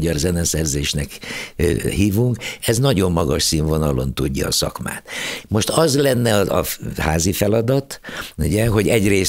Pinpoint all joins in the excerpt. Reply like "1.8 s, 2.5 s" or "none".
none